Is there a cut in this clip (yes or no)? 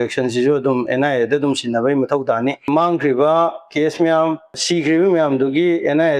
yes